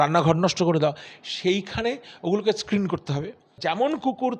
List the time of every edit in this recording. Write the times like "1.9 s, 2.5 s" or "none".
3.5 s